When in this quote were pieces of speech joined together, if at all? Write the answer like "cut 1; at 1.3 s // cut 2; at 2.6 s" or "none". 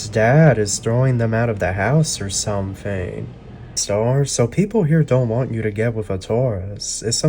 cut 1; at 3.8 s